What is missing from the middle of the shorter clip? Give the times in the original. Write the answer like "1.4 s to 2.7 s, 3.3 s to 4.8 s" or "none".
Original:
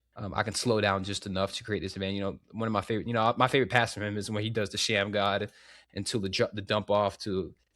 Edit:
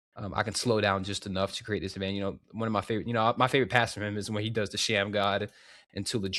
none